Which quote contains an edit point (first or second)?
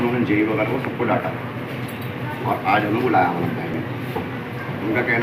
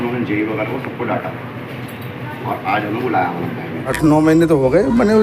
second